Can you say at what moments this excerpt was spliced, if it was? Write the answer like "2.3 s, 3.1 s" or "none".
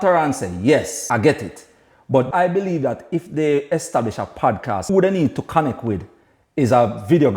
1.0 s, 2.3 s, 4.8 s